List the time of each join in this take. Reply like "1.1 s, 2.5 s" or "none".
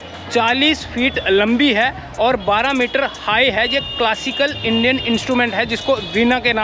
none